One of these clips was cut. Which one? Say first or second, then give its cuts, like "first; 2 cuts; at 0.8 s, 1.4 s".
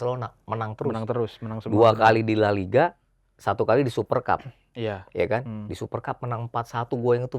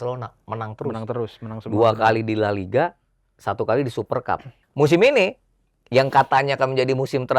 second; 1 cut; at 4.6 s